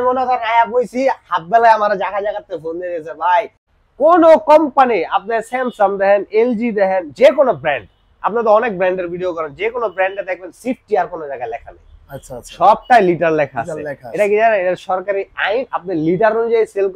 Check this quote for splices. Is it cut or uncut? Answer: cut